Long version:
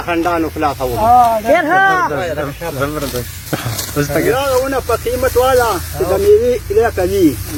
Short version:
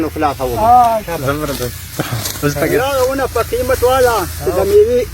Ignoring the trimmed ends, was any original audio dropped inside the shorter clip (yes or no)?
yes